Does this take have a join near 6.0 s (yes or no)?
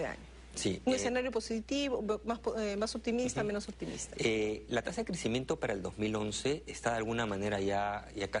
no